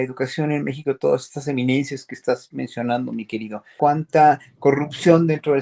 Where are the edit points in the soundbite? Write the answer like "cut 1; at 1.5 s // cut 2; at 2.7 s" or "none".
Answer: cut 1; at 3.7 s